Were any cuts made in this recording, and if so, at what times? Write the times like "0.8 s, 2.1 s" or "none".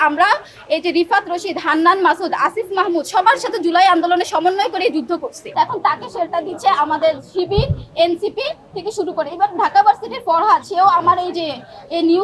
5.4 s